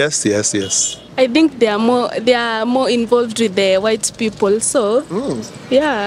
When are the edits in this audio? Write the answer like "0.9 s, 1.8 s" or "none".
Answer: 1.0 s